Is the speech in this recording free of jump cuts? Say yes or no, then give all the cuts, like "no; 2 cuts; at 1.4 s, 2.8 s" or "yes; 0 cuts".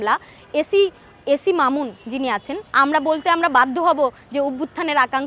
no; 1 cut; at 2.6 s